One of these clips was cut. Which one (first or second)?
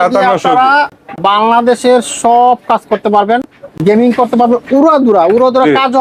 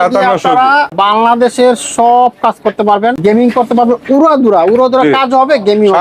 second